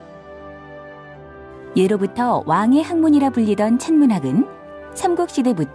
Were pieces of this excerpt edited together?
yes; 1 cut; at 4.4 s

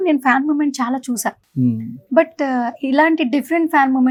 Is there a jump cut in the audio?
no; 0 cuts

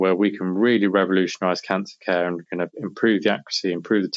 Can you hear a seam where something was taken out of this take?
no; 0 cuts

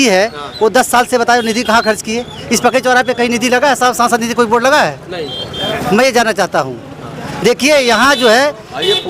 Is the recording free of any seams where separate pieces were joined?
yes; 0 cuts

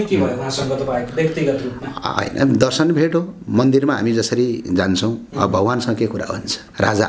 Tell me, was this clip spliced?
no; 0 cuts

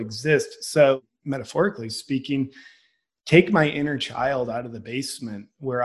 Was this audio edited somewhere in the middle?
yes; 1 cut; at 1.0 s

